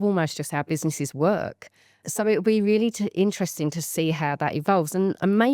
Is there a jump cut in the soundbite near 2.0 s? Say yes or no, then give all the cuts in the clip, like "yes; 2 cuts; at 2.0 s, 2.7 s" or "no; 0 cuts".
yes; 1 cut; at 2.0 s